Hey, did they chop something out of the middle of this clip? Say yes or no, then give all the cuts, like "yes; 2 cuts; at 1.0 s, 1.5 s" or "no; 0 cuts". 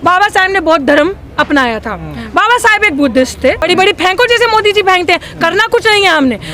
yes; 1 cut; at 3.6 s